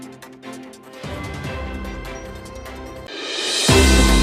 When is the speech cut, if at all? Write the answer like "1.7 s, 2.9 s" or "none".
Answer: none

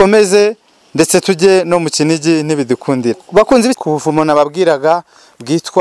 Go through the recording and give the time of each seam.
3.8 s

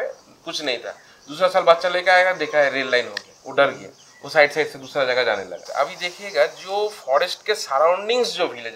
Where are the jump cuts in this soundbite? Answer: 5.6 s

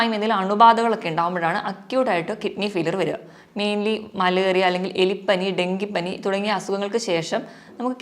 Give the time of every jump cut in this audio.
none

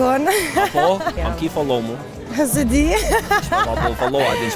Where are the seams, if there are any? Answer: 1.2 s

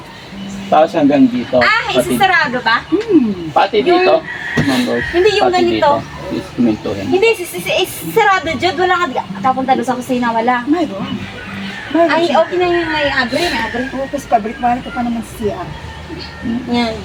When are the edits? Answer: none

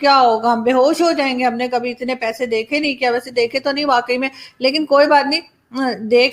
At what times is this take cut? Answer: none

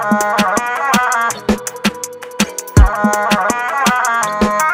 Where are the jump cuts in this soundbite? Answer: none

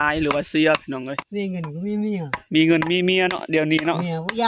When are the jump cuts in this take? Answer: 1.2 s

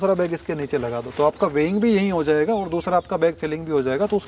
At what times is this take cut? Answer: none

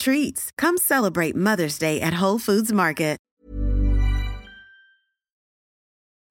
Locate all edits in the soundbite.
3.2 s

